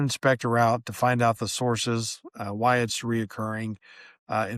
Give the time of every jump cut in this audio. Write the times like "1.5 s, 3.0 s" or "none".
none